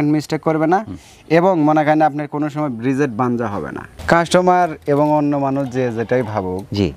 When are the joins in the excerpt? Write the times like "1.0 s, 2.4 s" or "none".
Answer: 4.0 s